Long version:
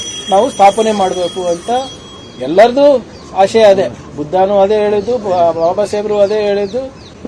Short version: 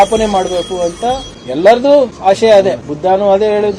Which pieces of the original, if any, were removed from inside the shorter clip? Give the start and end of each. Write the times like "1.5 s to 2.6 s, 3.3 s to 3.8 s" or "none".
2.0 s to 2.3 s, 3.1 s to 3.3 s, 4.0 s to 4.2 s